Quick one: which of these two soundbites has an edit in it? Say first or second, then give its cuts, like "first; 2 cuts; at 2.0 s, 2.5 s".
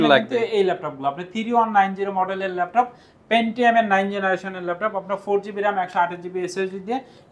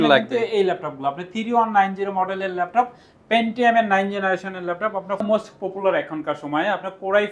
second; 1 cut; at 5.2 s